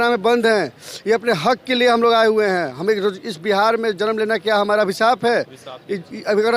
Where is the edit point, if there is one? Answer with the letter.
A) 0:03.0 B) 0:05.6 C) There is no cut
C